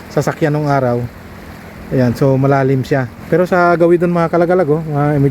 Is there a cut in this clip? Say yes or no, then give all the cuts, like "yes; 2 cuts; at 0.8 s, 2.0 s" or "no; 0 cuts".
yes; 1 cut; at 3.1 s